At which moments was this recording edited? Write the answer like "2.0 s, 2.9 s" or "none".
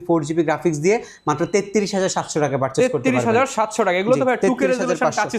none